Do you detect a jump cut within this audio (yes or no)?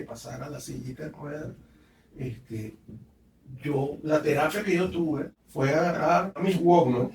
yes